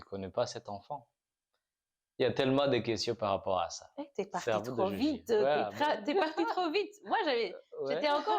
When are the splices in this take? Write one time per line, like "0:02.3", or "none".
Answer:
none